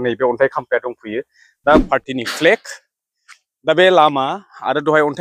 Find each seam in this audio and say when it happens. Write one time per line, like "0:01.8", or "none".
0:01.8